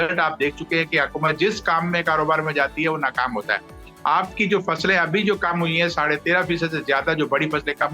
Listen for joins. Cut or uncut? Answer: uncut